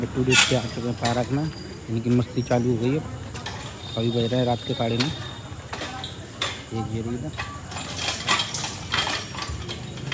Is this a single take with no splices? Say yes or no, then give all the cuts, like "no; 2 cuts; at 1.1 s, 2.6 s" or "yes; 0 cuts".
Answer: yes; 0 cuts